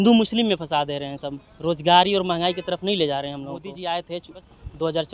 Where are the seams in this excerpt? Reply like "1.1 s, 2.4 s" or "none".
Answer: 3.6 s